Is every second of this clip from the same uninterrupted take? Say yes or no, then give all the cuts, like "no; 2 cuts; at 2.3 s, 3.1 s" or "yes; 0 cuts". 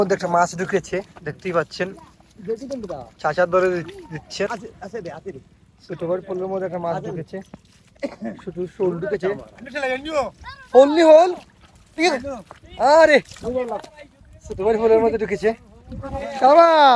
no; 2 cuts; at 4.5 s, 7.9 s